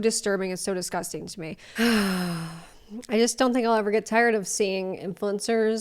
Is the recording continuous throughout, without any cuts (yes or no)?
no